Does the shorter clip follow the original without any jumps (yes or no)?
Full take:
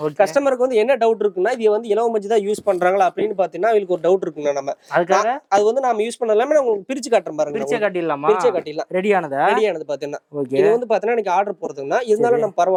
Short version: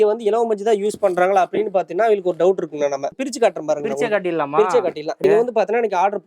no